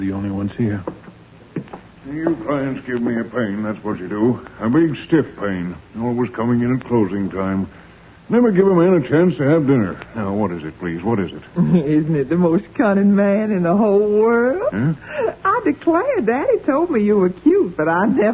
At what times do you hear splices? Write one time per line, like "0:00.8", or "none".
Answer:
0:10.6